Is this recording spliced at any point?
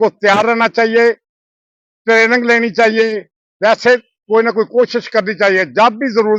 no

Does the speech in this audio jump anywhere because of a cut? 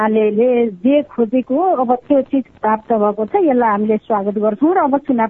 no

